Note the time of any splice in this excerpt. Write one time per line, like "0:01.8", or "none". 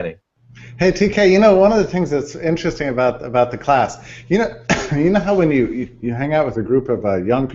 0:05.2